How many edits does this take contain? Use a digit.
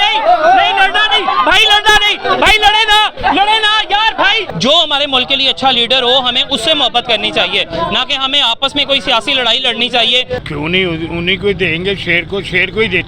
2